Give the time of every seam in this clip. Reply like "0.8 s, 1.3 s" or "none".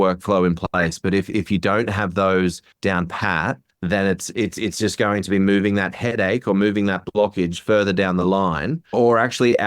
2.7 s, 3.7 s, 8.9 s